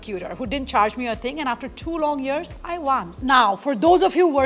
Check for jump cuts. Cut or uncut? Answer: cut